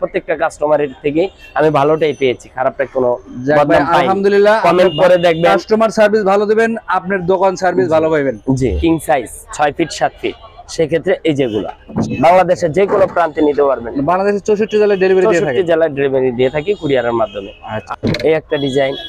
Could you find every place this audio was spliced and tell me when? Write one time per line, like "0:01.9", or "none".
0:08.8
0:11.9
0:17.8